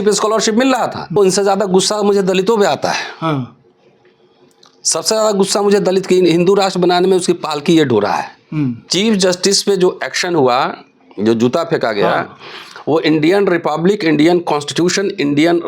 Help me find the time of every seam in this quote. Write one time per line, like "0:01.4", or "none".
0:01.2
0:08.8